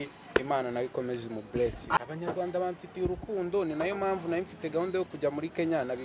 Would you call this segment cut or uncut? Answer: cut